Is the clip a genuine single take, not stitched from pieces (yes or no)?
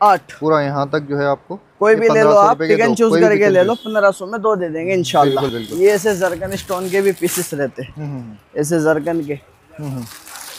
yes